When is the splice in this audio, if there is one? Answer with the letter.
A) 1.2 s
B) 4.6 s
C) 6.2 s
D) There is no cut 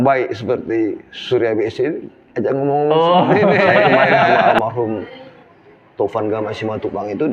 B